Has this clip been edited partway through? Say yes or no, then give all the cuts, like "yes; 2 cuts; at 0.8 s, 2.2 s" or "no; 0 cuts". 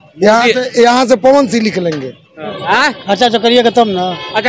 yes; 1 cut; at 2.4 s